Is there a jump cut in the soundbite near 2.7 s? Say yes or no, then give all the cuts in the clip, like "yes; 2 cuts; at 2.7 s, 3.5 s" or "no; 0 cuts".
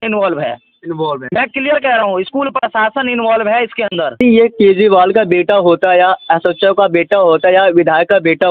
no; 1 cut; at 4.2 s